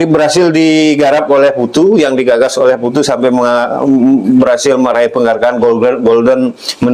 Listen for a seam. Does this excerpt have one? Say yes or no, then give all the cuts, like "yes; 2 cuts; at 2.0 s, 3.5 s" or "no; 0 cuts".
no; 0 cuts